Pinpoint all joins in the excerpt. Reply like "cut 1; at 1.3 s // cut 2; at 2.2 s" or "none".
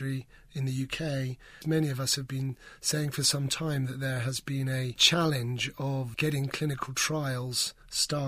cut 1; at 1.6 s // cut 2; at 5.0 s // cut 3; at 6.1 s